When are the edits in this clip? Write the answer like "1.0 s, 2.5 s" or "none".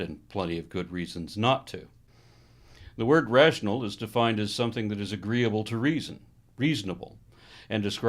5.0 s